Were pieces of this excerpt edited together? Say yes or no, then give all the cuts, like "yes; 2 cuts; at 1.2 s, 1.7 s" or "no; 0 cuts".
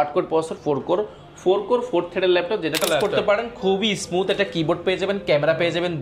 yes; 1 cut; at 2.8 s